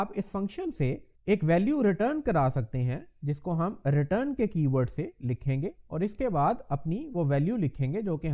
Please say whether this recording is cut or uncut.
uncut